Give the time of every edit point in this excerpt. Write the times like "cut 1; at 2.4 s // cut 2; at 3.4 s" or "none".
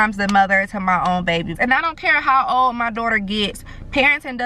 cut 1; at 1.5 s